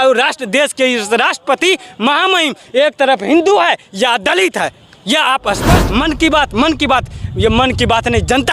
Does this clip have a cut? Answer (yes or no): yes